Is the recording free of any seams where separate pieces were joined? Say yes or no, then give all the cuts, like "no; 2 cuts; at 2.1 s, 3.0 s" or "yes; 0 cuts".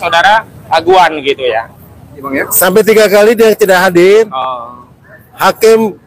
no; 1 cut; at 2.3 s